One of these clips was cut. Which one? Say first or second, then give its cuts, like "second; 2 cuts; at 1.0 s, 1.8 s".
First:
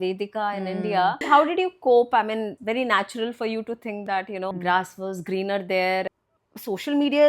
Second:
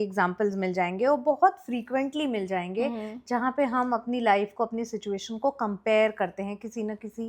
first; 4 cuts; at 1.2 s, 2.5 s, 4.5 s, 6.1 s